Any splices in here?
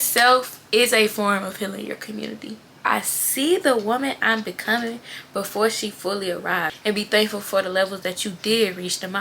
yes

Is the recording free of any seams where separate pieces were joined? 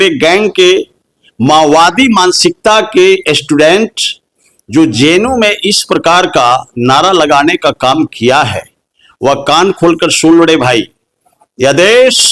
yes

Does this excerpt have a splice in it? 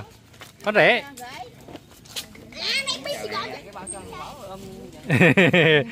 yes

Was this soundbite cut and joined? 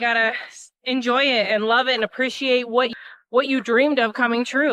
yes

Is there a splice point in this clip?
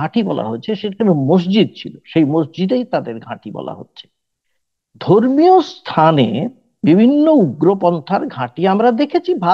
no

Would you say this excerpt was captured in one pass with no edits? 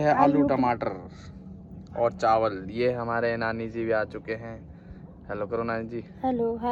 yes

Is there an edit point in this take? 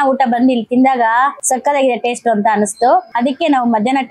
yes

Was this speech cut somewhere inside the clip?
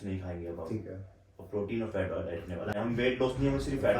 yes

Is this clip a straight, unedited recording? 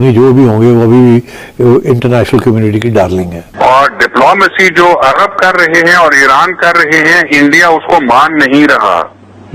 no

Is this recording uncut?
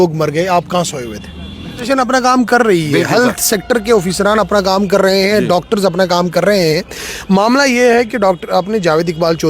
no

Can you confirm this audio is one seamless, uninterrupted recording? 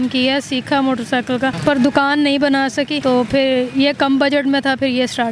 no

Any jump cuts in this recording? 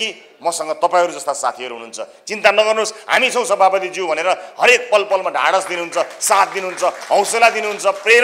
no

